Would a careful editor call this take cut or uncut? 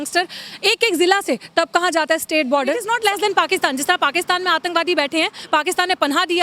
cut